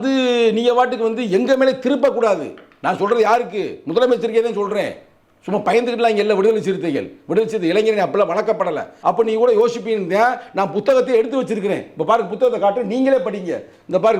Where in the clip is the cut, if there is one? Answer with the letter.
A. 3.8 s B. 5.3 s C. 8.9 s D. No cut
C